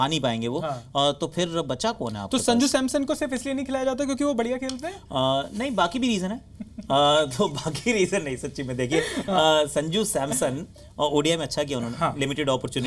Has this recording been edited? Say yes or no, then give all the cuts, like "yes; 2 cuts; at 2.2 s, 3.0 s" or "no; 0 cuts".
no; 0 cuts